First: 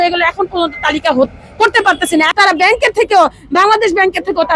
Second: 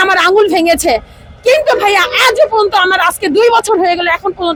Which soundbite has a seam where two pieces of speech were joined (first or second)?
first